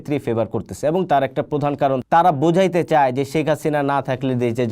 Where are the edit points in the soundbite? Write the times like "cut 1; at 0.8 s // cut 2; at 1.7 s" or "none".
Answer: cut 1; at 2.0 s